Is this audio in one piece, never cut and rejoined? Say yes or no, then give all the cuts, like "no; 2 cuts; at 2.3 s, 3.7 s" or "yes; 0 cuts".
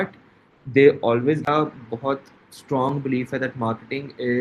no; 1 cut; at 1.5 s